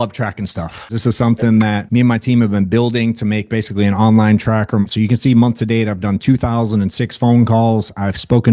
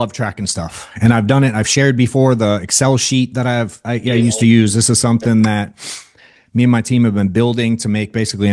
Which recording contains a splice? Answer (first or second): first